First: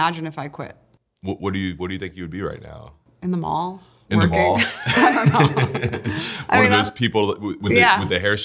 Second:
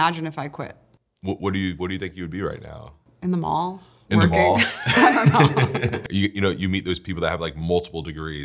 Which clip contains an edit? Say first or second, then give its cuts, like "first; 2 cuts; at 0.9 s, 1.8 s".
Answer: second; 1 cut; at 6.0 s